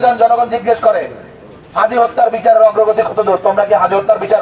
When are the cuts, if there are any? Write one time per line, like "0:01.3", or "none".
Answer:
none